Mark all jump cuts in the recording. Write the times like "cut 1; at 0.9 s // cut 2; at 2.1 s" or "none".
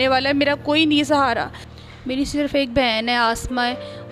cut 1; at 1.7 s